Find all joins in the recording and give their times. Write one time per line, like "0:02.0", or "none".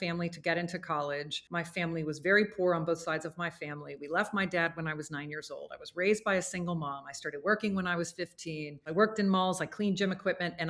0:01.4
0:08.7